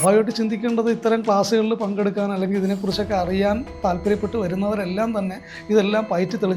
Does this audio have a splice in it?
no; 0 cuts

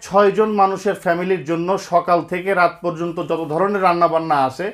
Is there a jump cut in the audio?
no; 0 cuts

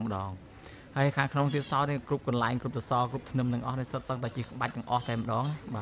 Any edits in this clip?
no; 0 cuts

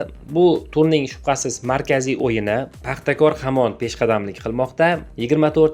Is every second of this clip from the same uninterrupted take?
no; 1 cut; at 2.8 s

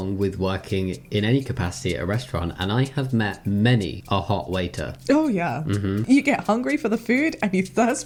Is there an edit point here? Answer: no; 0 cuts

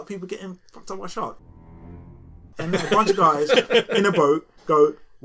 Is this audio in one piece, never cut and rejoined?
yes; 0 cuts

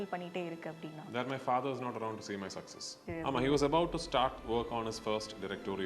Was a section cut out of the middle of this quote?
yes; 2 cuts; at 3.0 s, 4.4 s

